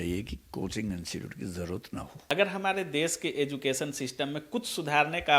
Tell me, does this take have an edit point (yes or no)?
yes